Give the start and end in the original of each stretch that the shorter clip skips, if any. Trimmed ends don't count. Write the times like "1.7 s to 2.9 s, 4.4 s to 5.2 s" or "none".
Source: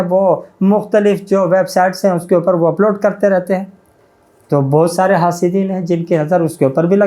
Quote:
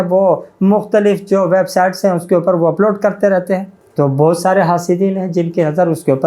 3.8 s to 4.3 s